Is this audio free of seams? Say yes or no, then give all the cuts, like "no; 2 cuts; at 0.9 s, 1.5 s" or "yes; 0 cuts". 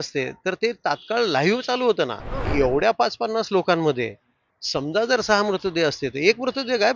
no; 1 cut; at 2.5 s